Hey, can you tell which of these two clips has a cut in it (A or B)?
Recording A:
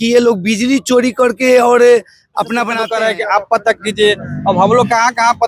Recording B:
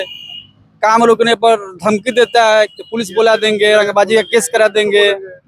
A